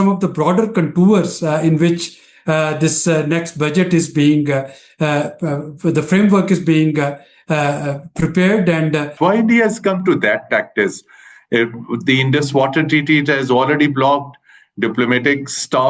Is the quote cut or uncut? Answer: cut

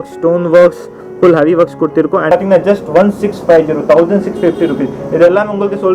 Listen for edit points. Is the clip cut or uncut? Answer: cut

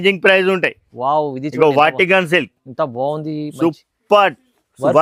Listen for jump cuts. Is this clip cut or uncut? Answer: uncut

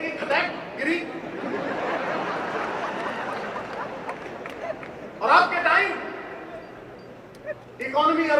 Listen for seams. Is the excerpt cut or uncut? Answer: uncut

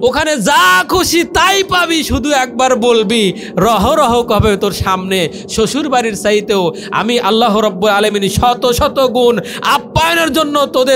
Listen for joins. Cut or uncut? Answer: uncut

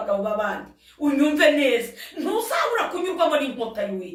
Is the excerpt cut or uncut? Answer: uncut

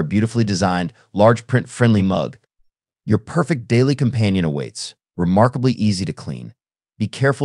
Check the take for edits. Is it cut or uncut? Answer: uncut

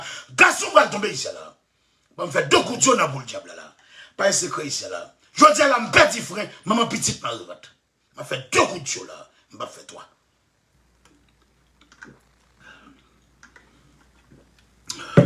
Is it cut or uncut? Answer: uncut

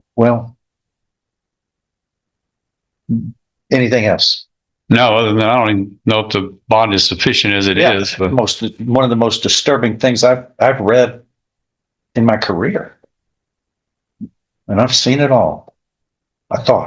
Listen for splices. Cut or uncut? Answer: uncut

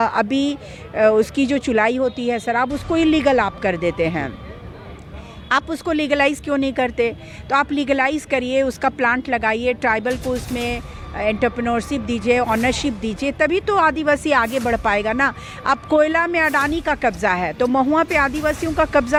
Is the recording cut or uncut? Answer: uncut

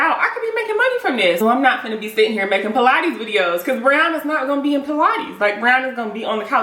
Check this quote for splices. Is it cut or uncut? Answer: cut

